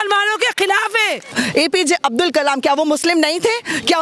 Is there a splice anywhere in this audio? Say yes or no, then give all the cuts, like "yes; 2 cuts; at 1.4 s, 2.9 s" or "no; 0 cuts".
yes; 1 cut; at 1.3 s